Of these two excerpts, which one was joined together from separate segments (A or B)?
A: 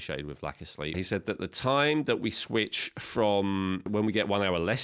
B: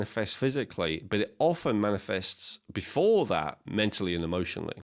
A